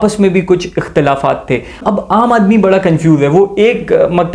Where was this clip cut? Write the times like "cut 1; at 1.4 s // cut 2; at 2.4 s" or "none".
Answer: cut 1; at 1.8 s